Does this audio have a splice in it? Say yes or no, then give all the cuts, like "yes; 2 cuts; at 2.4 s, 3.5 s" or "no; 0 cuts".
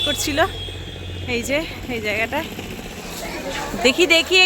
yes; 1 cut; at 3.1 s